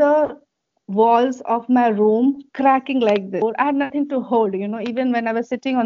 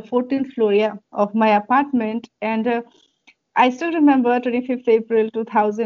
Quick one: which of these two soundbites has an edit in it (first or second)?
first